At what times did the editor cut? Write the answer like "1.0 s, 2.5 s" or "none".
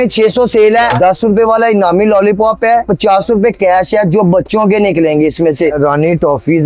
0.9 s, 5.8 s